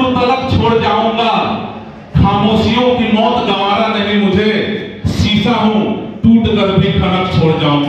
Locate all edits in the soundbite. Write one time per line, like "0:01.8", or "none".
none